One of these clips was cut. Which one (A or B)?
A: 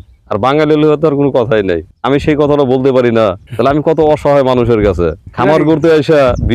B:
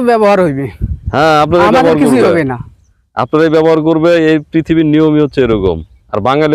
A